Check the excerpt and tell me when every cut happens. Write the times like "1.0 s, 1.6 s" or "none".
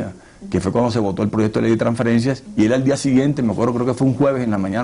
2.4 s